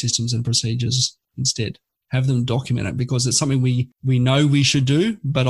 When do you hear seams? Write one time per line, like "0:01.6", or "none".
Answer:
0:03.9

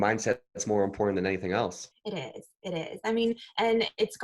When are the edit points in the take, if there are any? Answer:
0:01.9

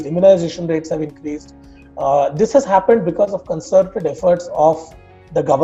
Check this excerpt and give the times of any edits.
none

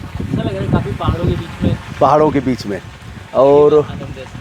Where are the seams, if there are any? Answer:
none

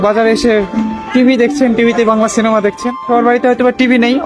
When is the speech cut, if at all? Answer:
0:03.1

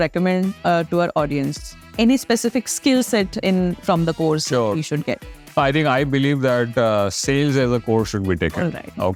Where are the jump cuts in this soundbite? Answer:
none

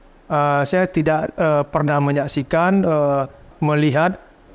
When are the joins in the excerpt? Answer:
0:03.4

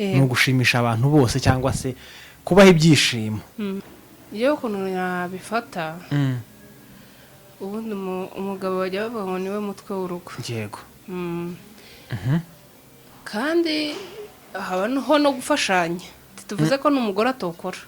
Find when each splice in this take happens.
0:03.8

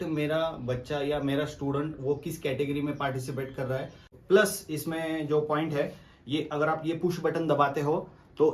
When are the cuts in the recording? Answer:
0:04.2

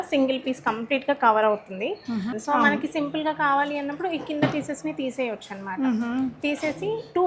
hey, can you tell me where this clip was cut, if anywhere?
0:02.3

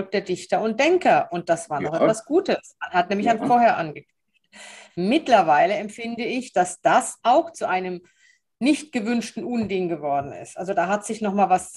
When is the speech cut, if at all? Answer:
none

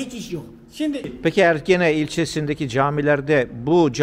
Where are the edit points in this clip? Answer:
0:01.1

